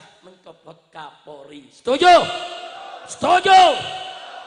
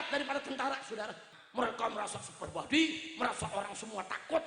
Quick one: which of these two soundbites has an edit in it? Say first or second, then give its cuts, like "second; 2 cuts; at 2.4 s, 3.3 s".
second; 1 cut; at 1.2 s